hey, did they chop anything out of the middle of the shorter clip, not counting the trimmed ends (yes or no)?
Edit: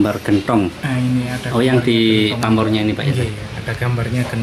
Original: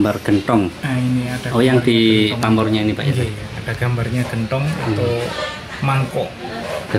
no